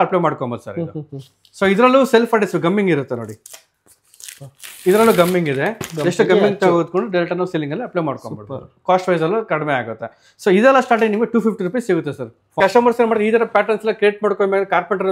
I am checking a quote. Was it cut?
yes; 1 cut; at 12.4 s

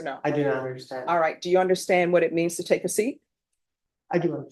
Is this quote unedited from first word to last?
yes; 0 cuts

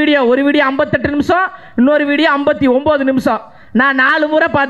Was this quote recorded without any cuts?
yes; 0 cuts

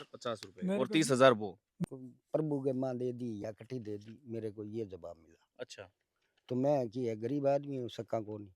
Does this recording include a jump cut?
yes; 1 cut; at 1.7 s

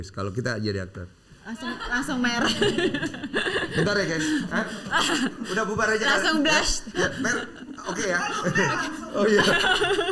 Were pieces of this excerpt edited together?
no; 0 cuts

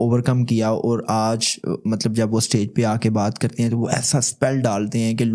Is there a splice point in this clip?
no; 0 cuts

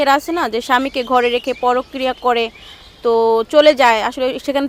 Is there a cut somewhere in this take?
no; 0 cuts

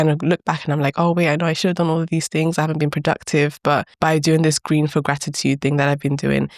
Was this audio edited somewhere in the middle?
yes; 1 cut; at 3.9 s

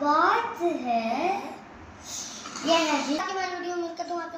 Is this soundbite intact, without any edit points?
no; 1 cut; at 3.2 s

